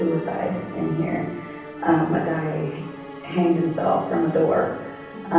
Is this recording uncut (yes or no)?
yes